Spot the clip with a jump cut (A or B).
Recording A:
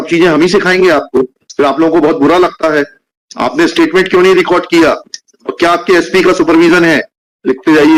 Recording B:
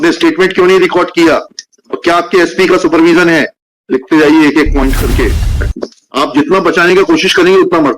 B